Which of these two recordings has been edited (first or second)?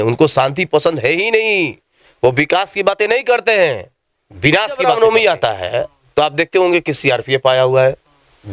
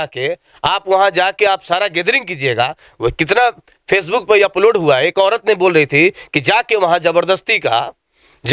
first